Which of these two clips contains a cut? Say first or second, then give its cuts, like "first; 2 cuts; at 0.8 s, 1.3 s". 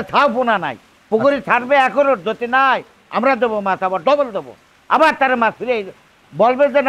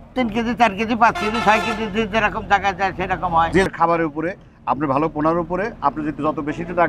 second; 1 cut; at 3.7 s